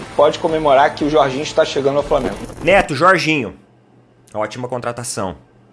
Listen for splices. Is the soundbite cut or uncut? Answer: cut